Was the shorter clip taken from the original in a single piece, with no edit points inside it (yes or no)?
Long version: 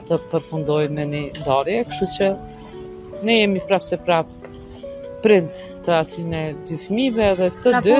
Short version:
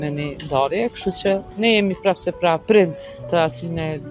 no